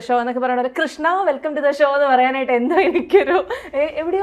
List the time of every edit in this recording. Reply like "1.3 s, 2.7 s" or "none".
none

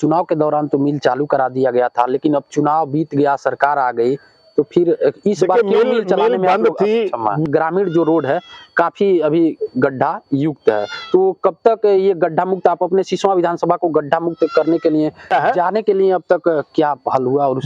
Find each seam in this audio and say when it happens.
7.5 s, 15.3 s

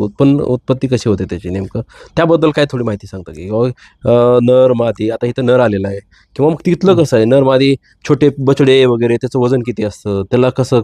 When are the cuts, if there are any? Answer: none

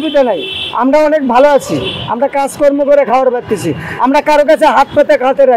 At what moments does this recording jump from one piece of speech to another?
none

